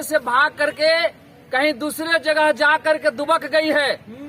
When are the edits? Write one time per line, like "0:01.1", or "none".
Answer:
none